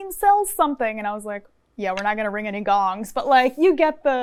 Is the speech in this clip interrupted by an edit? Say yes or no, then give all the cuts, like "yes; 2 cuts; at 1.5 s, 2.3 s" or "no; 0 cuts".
no; 0 cuts